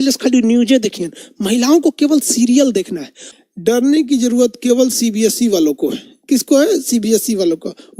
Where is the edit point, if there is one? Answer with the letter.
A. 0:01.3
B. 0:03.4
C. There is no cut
B